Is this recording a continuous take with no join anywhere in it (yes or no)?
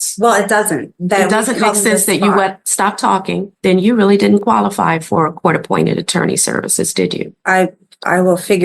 no